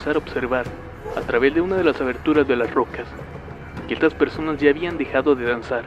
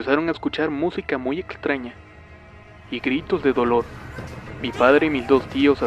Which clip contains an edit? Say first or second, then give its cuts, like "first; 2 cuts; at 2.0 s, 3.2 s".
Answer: second; 1 cut; at 3.5 s